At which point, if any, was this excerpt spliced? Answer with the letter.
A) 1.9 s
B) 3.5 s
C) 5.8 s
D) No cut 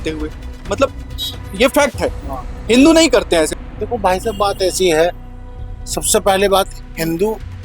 B